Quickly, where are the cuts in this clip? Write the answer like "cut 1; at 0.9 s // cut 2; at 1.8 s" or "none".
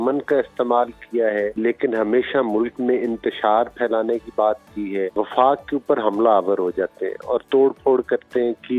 cut 1; at 1.5 s // cut 2; at 5.1 s